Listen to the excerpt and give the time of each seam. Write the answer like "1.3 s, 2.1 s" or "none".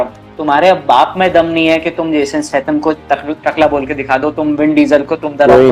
none